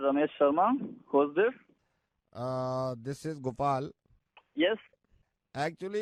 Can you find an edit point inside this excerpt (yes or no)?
no